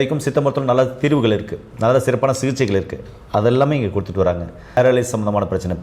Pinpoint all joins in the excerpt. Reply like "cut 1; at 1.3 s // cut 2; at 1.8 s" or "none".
cut 1; at 4.8 s